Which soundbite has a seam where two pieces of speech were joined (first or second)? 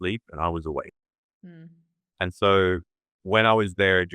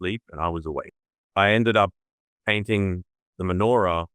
second